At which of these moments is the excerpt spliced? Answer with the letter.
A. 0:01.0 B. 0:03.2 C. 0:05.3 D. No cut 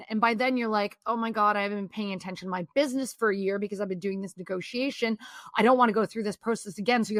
D